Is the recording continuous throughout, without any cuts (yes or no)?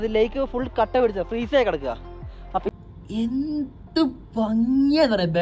no